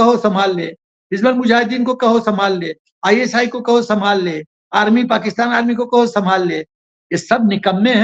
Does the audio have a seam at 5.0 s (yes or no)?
no